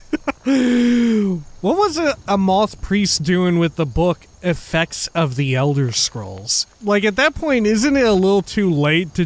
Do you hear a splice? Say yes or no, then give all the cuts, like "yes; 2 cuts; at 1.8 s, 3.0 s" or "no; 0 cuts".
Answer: yes; 1 cut; at 6.7 s